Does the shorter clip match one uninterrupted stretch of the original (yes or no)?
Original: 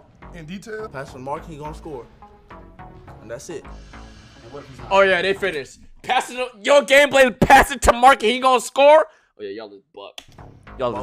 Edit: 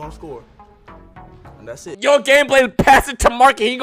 no